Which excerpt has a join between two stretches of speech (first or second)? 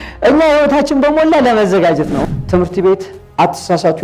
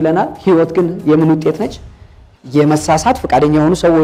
first